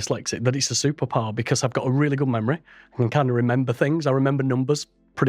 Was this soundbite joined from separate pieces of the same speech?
no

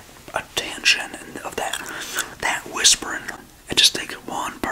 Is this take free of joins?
no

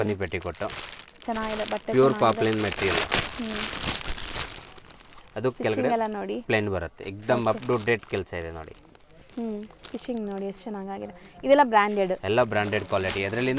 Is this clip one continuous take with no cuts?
yes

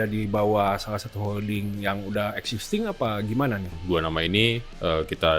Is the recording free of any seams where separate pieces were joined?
no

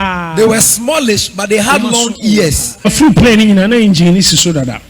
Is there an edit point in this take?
yes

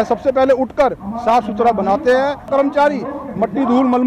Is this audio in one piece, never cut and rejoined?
no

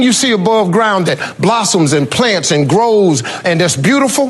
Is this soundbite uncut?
yes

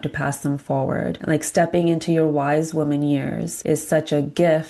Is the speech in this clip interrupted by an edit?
yes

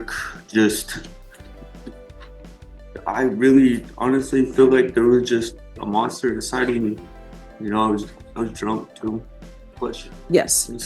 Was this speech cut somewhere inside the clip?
yes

